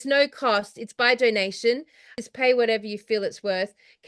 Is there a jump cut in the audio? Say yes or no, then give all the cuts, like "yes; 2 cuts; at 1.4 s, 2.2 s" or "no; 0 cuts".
yes; 1 cut; at 2.1 s